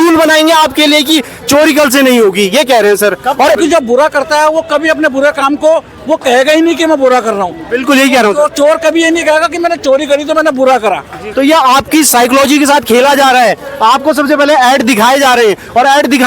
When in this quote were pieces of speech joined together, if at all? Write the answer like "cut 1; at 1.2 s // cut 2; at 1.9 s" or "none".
cut 1; at 3.6 s // cut 2; at 11.2 s